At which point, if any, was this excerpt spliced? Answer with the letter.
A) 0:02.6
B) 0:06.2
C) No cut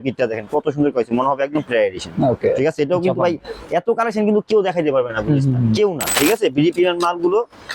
B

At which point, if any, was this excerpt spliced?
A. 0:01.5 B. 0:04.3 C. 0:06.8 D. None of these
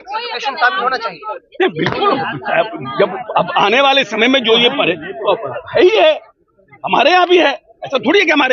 D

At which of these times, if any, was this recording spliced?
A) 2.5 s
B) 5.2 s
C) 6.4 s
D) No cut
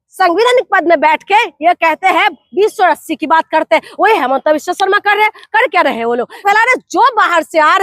C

